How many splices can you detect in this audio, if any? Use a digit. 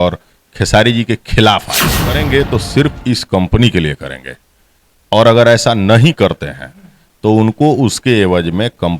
1